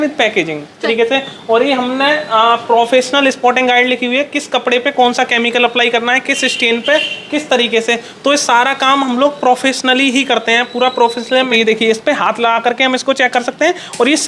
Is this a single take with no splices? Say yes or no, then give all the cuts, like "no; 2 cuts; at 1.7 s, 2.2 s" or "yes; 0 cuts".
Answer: no; 2 cuts; at 0.8 s, 11.5 s